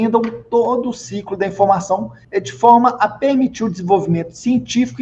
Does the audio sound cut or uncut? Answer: uncut